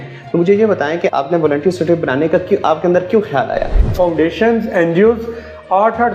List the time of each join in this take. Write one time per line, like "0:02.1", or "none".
0:03.8

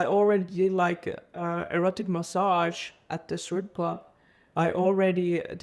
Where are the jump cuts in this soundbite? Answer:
none

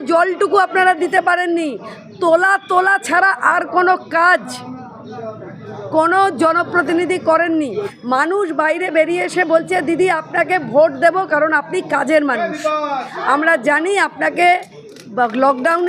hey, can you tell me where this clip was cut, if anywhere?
0:07.7

